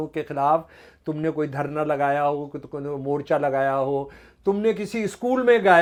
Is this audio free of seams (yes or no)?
yes